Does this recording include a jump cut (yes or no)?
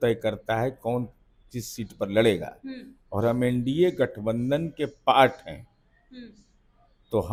no